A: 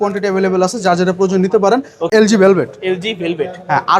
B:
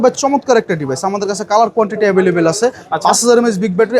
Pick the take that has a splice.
A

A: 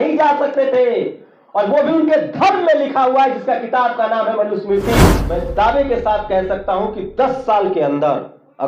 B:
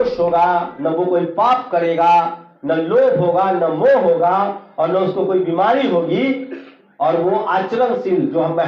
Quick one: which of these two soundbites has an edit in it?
A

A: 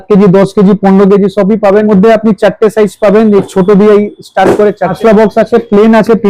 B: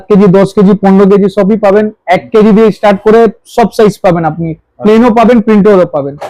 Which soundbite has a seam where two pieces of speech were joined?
A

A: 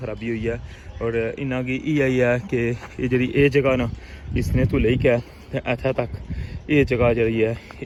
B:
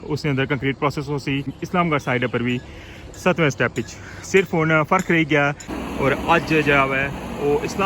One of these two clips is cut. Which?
B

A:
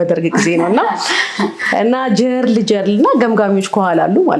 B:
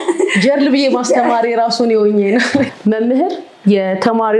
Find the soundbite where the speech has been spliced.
B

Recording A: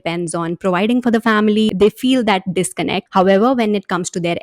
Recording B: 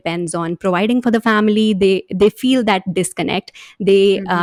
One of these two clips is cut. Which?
A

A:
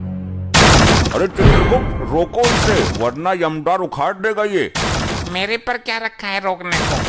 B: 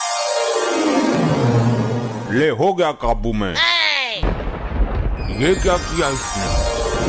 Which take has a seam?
B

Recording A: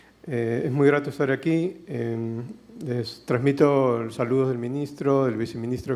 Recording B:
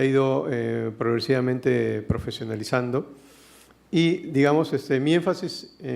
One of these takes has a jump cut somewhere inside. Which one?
B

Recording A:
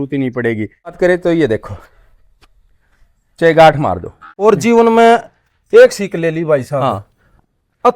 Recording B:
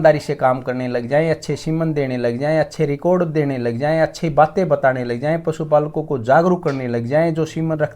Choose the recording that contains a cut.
A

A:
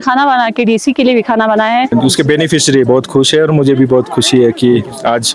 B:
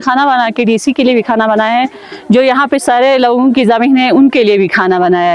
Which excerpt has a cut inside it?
A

